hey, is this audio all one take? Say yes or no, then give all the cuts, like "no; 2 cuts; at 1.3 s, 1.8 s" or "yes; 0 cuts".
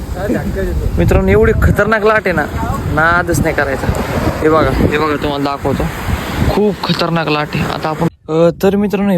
no; 1 cut; at 8.1 s